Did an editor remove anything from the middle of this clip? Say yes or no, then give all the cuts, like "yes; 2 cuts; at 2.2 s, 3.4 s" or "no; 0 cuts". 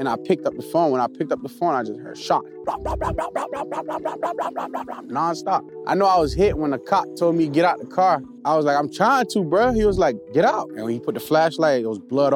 yes; 3 cuts; at 5.7 s, 8.3 s, 10.7 s